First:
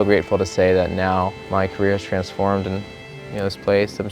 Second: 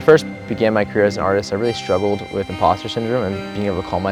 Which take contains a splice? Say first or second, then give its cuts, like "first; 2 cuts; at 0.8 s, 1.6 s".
first; 1 cut; at 1.4 s